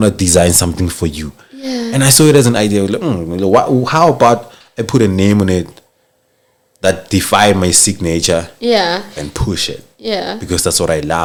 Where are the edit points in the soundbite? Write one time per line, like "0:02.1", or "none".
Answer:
none